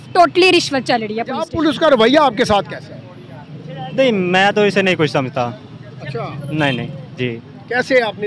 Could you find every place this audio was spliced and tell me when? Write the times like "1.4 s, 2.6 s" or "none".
1.5 s